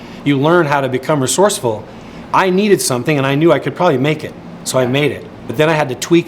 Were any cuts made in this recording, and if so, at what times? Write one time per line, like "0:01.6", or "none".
0:05.3